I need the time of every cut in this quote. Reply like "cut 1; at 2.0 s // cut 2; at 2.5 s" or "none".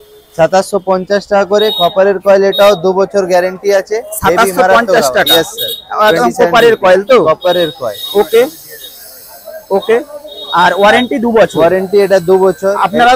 none